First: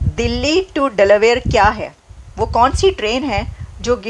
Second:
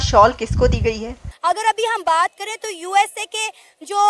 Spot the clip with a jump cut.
second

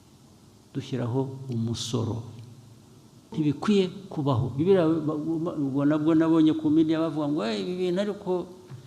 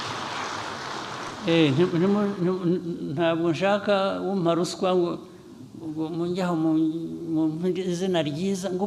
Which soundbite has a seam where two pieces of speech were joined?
first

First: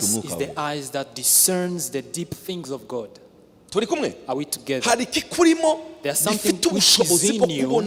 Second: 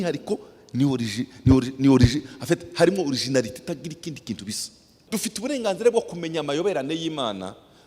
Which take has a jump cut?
second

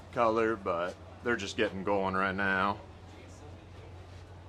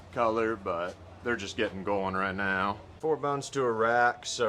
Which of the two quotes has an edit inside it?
second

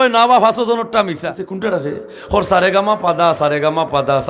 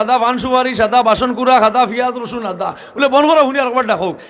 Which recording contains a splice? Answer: first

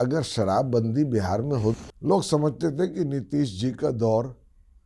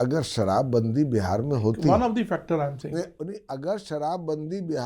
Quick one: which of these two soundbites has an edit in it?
first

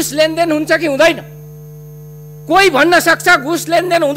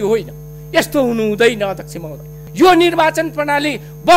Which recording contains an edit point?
second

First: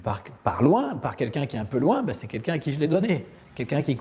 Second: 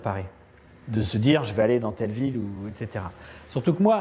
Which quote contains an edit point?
second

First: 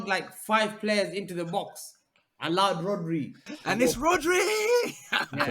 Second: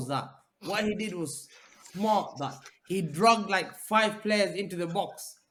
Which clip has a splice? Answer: first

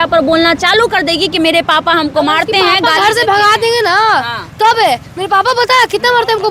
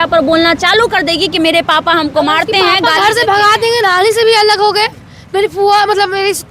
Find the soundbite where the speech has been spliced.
second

